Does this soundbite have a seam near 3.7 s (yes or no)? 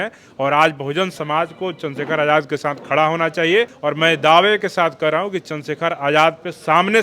yes